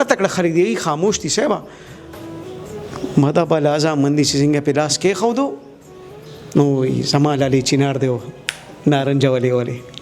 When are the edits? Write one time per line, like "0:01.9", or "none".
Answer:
none